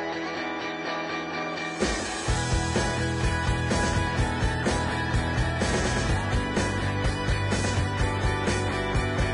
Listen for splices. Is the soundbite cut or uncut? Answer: cut